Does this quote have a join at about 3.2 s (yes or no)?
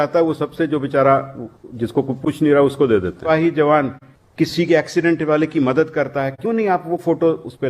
yes